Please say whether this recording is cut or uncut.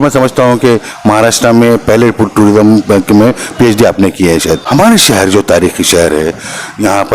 cut